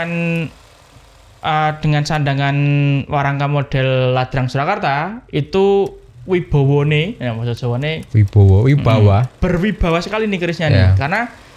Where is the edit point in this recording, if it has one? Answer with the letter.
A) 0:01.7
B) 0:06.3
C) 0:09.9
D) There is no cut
D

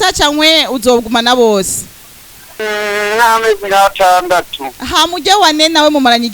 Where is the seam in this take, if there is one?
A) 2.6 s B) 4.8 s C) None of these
A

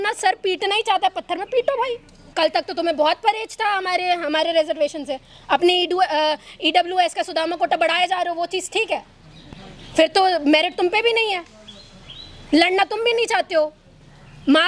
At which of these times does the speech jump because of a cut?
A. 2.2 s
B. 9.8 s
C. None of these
A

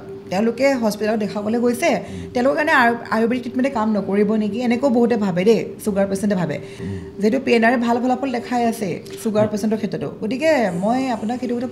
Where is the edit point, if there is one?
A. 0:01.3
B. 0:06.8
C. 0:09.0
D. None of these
B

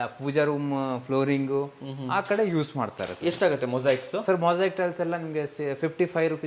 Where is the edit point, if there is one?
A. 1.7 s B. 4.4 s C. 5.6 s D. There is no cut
D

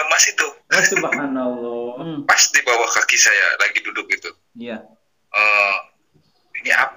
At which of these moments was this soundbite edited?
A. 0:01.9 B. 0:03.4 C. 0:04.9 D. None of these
A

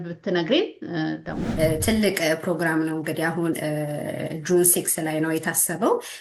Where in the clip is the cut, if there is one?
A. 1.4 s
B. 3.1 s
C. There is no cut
A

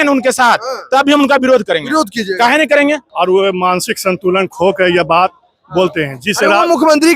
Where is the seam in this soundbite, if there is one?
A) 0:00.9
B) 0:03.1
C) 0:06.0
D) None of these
B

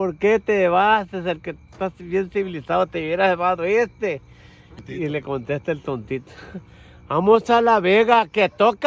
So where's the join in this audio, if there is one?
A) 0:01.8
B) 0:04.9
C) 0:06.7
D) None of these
B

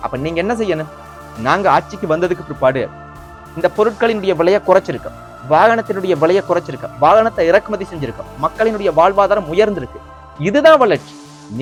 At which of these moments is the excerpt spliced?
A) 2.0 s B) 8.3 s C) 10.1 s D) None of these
D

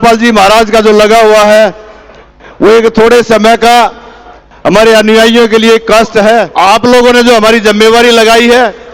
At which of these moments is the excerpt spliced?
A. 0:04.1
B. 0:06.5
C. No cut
B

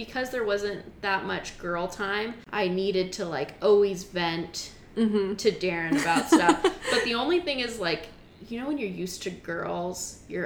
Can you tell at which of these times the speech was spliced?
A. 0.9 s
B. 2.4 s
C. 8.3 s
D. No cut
B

